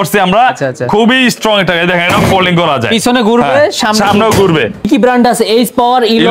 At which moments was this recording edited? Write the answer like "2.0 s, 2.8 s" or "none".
4.9 s